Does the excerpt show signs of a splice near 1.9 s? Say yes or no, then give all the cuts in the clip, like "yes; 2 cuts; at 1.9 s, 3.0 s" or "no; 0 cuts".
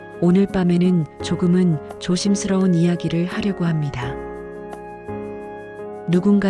no; 2 cuts; at 3.9 s, 5.4 s